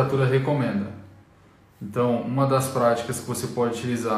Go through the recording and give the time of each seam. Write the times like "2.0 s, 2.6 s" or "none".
none